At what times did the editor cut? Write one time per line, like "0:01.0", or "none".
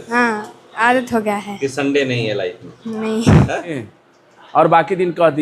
0:03.9